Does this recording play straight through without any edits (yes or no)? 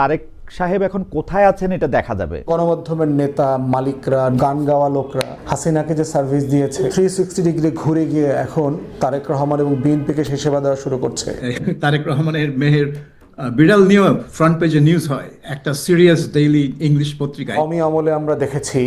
no